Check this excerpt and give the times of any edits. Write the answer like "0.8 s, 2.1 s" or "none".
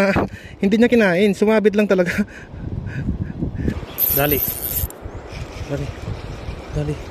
3.7 s